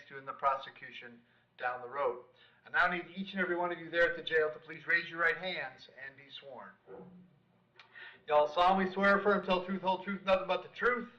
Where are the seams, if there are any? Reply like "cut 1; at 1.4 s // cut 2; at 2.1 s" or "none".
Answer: cut 1; at 8.8 s // cut 2; at 10.0 s